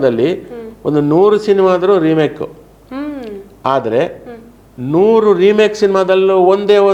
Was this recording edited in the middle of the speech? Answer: no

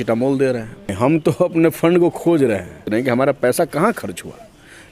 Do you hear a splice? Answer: yes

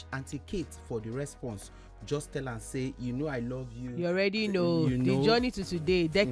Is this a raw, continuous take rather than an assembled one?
yes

